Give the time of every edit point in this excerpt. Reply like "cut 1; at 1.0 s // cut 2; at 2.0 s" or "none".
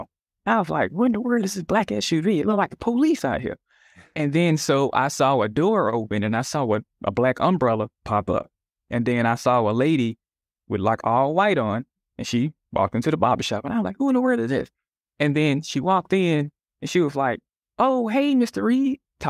none

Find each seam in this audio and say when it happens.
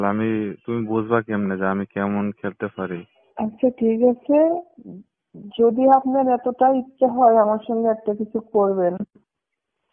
cut 1; at 3.2 s

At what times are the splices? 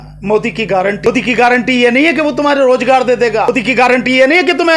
cut 1; at 1.1 s // cut 2; at 3.5 s

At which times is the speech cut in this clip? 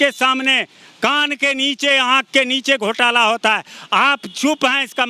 none

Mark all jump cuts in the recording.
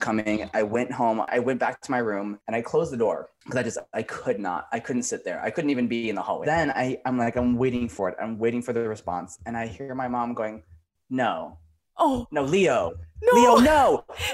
cut 1; at 1.3 s // cut 2; at 6.4 s

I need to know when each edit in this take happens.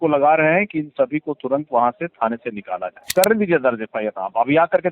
cut 1; at 3.1 s

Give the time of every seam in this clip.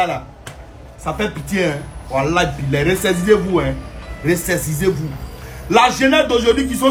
none

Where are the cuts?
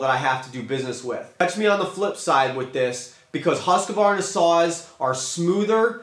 cut 1; at 1.3 s

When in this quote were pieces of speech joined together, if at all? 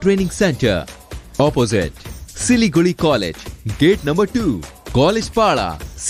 none

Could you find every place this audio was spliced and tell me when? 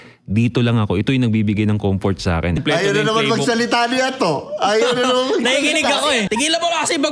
cut 1; at 2.6 s // cut 2; at 6.3 s

